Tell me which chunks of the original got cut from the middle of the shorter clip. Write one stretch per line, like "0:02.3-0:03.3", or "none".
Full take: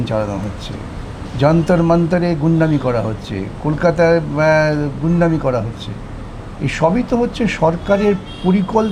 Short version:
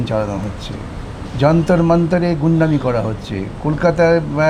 none